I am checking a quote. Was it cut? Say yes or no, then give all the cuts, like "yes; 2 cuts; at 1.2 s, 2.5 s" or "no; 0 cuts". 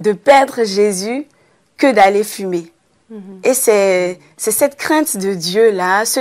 no; 0 cuts